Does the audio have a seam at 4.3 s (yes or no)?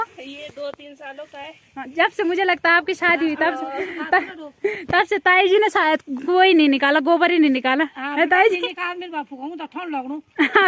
no